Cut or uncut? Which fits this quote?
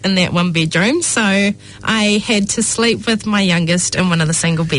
cut